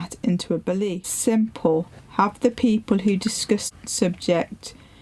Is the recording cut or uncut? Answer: cut